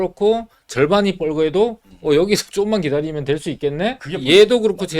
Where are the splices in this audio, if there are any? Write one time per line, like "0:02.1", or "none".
0:04.1